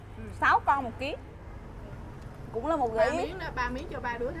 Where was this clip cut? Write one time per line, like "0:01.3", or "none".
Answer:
0:01.3